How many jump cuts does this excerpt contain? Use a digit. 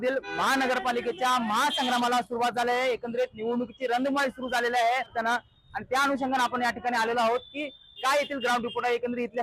0